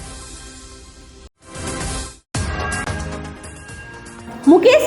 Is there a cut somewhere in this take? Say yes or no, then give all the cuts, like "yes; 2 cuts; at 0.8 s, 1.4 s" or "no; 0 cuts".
yes; 1 cut; at 1.0 s